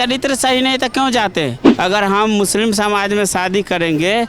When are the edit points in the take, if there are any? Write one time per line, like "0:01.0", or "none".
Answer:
0:01.6